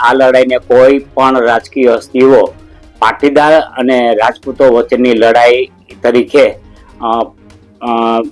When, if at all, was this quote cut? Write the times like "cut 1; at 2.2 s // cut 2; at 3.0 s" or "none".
none